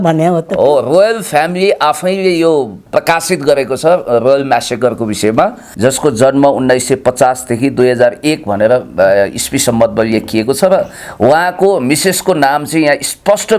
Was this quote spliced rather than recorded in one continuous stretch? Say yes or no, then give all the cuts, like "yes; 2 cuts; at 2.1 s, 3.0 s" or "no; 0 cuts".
yes; 1 cut; at 5.6 s